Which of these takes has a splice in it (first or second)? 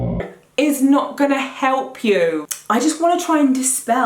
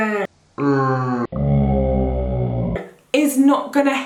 first